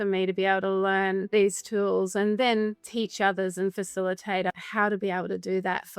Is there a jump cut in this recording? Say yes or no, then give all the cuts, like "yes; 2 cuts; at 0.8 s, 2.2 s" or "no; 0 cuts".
yes; 3 cuts; at 1.2 s, 2.8 s, 4.5 s